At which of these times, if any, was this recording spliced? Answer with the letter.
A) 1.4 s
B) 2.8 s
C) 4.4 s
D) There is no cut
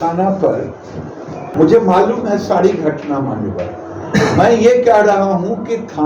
A